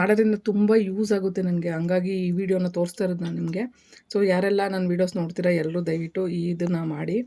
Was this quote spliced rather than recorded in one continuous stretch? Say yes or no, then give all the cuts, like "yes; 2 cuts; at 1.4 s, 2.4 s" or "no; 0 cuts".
no; 0 cuts